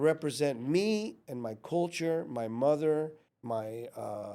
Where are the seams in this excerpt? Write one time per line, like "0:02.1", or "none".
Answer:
0:03.3